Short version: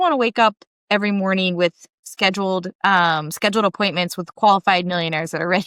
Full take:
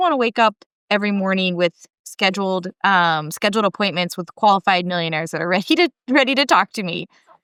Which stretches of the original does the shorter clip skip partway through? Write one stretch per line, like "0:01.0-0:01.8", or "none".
none